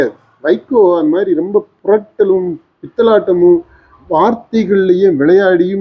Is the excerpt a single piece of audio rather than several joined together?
yes; 0 cuts

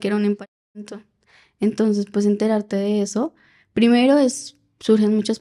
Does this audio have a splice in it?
no; 0 cuts

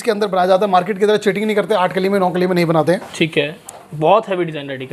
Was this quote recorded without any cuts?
yes; 0 cuts

